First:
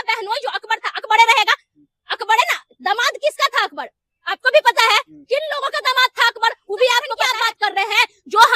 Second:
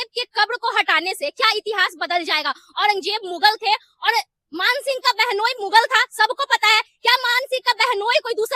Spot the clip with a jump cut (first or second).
first